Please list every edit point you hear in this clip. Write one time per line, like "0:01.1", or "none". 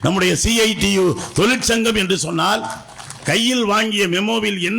none